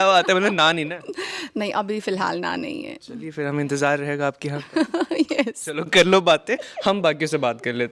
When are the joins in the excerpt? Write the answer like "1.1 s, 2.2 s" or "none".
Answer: none